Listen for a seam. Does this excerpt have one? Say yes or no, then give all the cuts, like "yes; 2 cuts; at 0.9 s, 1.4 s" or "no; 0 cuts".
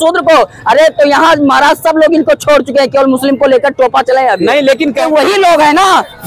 yes; 1 cut; at 5.0 s